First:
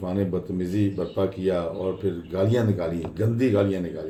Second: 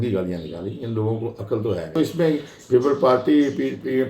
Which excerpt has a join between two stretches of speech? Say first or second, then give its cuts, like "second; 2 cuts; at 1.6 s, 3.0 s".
second; 1 cut; at 2.0 s